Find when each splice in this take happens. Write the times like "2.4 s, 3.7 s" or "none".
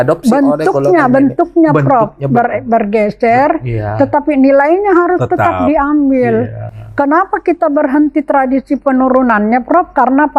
none

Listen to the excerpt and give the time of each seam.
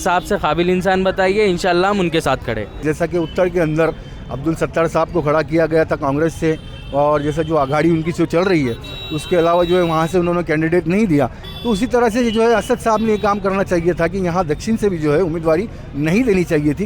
2.8 s

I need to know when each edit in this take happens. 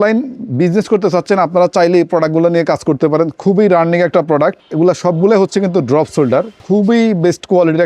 4.6 s, 6.6 s

